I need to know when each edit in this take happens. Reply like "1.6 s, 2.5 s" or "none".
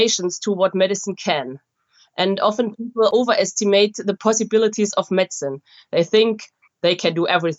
3.1 s, 4.2 s